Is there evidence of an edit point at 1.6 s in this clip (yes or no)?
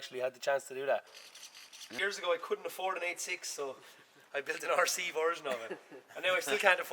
yes